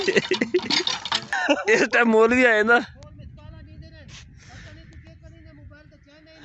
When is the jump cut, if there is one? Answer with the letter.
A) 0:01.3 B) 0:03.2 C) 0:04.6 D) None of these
A